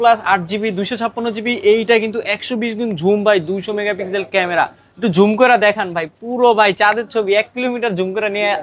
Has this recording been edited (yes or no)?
no